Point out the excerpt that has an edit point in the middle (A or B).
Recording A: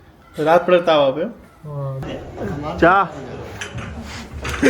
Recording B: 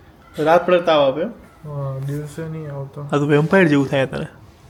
A